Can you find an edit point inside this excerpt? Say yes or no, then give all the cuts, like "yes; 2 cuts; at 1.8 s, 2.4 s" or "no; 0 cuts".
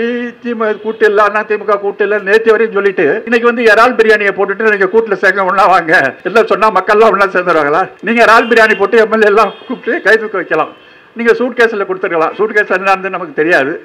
yes; 3 cuts; at 3.2 s, 6.2 s, 8.0 s